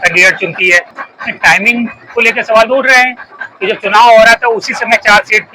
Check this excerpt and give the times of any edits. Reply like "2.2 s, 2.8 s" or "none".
0.9 s